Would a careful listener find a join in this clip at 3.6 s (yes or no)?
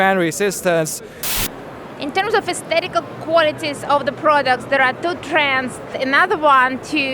no